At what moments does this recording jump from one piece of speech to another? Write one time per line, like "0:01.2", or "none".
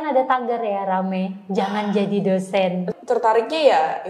0:02.9